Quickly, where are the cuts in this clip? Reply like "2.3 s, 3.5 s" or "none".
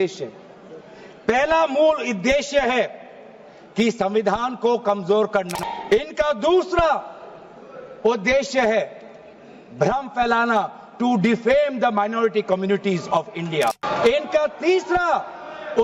5.6 s, 13.8 s